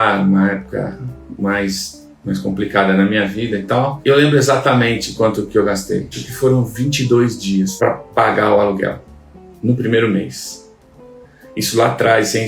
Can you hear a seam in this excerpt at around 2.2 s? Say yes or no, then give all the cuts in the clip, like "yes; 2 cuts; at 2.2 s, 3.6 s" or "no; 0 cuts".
no; 3 cuts; at 4.0 s, 6.2 s, 7.7 s